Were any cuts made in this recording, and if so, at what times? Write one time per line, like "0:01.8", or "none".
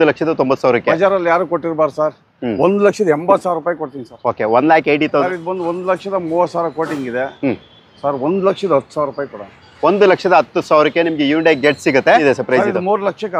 0:05.2
0:12.2